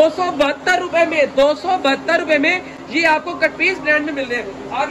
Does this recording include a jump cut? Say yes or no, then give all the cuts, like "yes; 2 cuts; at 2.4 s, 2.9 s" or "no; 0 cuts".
no; 0 cuts